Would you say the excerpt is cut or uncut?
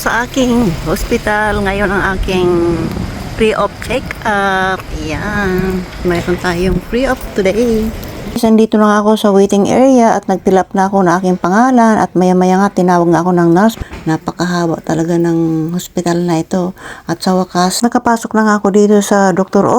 cut